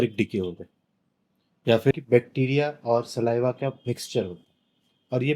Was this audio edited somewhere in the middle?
yes; 1 cut; at 2.0 s

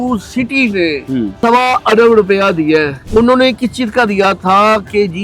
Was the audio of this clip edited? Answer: yes; 2 cuts; at 1.3 s, 3.0 s

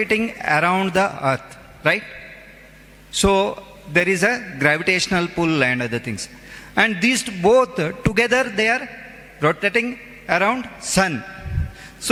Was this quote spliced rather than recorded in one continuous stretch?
no; 0 cuts

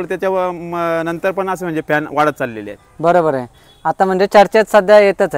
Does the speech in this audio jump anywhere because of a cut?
no; 0 cuts

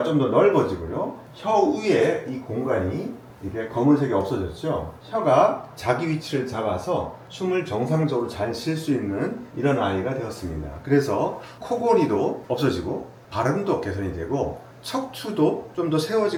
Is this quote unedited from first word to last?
yes; 0 cuts

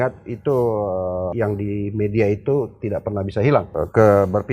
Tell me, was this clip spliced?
yes; 2 cuts; at 1.3 s, 3.7 s

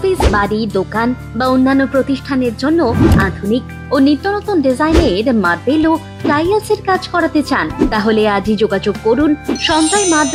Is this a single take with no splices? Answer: yes; 0 cuts

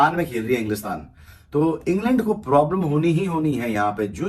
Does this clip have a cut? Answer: no; 0 cuts

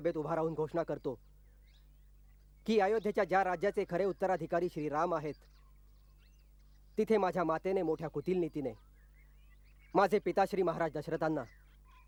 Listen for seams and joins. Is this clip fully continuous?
yes; 0 cuts

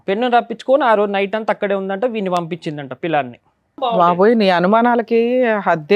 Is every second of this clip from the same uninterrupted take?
no; 1 cut; at 4.0 s

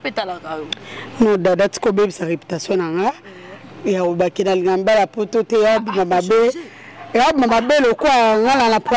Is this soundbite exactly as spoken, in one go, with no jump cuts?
yes; 0 cuts

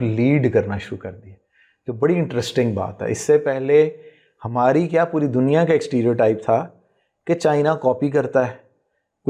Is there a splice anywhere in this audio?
no; 0 cuts

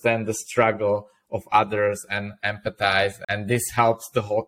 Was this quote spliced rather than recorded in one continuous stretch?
yes; 1 cut; at 3.2 s

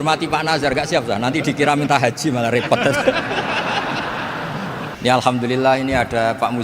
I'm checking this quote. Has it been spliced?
yes; 1 cut; at 4.9 s

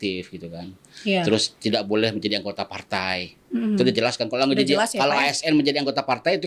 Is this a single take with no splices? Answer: yes; 0 cuts

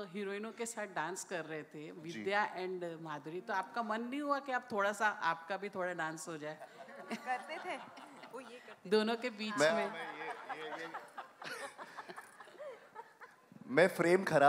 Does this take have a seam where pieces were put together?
no; 0 cuts

